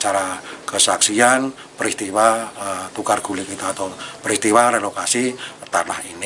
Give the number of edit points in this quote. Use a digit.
0